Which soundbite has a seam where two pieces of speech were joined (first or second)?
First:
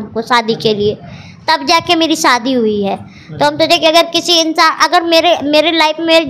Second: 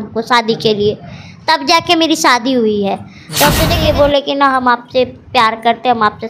second